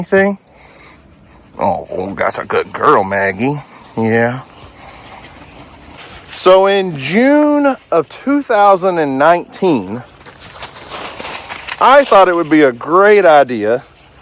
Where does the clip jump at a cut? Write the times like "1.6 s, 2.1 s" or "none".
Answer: 5.9 s